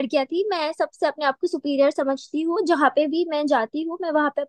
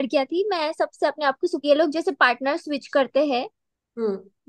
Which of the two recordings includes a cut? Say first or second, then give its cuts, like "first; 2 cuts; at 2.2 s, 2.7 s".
second; 1 cut; at 1.6 s